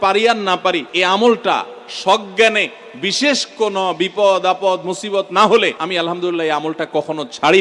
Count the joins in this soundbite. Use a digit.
2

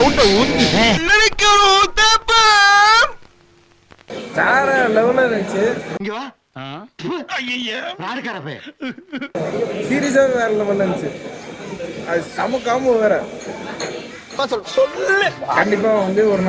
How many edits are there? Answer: 2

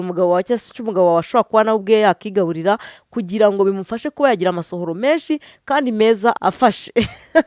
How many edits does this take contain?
1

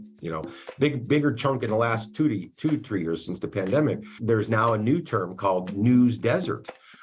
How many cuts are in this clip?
1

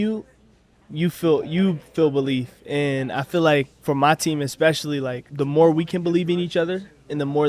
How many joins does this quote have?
2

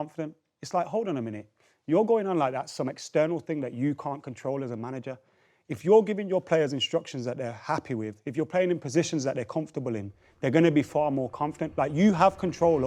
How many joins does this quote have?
0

